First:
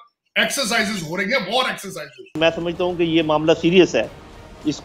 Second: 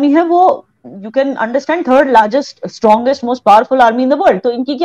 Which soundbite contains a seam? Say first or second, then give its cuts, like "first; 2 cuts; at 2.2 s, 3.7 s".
first; 1 cut; at 2.4 s